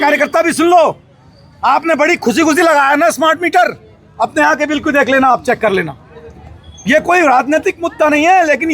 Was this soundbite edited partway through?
no; 0 cuts

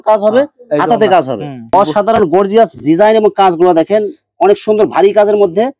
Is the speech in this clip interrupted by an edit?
yes; 1 cut; at 1.7 s

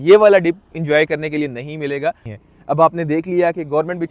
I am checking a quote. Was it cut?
yes; 1 cut; at 2.3 s

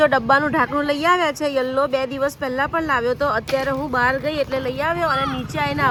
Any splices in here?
no; 0 cuts

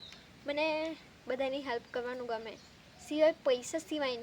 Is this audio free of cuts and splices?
yes; 0 cuts

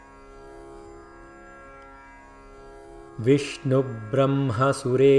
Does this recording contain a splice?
no; 0 cuts

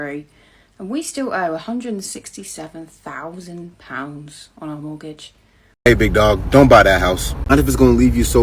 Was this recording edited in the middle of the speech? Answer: yes; 1 cut; at 5.7 s

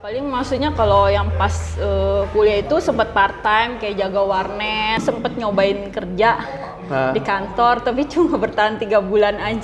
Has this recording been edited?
yes; 1 cut; at 5.0 s

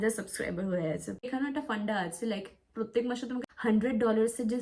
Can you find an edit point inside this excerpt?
yes; 2 cuts; at 1.2 s, 3.4 s

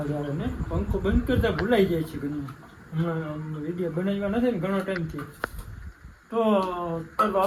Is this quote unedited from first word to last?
yes; 0 cuts

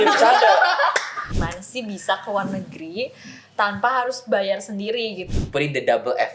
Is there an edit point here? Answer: yes; 2 cuts; at 1.4 s, 5.2 s

